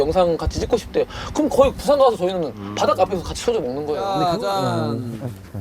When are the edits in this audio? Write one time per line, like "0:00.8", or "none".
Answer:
0:04.0

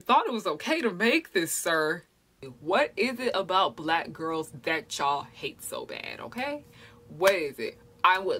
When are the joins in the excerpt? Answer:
0:02.2

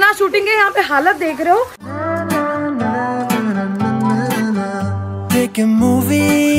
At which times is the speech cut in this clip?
0:01.8

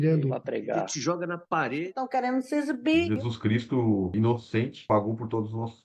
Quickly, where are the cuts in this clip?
none

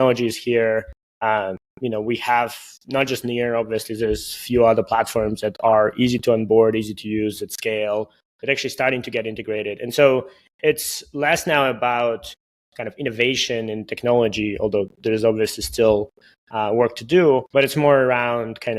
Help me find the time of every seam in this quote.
0:01.0
0:17.5

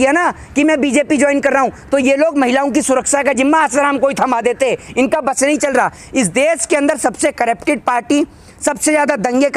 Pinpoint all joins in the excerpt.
none

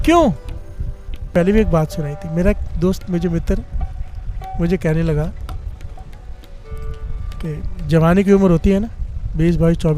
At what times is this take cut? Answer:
0:01.3

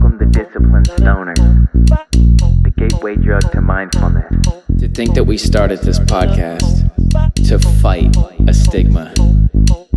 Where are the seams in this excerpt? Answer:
0:04.9

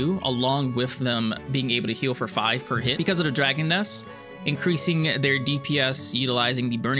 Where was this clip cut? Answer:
0:02.9

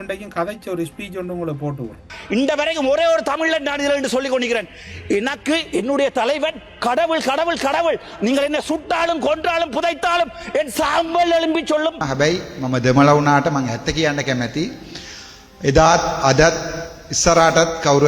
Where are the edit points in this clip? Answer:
0:02.0
0:12.1

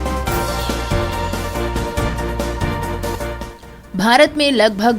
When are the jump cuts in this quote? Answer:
0:03.1

